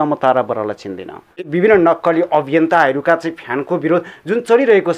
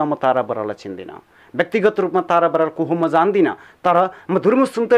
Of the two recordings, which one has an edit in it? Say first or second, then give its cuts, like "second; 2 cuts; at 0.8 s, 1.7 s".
first; 1 cut; at 1.4 s